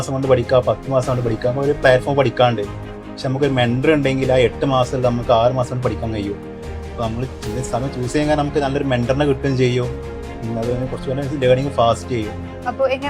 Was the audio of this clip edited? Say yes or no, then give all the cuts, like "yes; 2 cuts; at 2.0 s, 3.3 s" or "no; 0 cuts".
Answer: no; 0 cuts